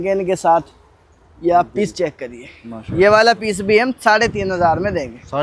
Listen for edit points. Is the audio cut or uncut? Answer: uncut